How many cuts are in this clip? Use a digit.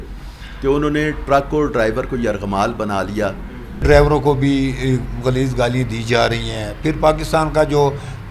1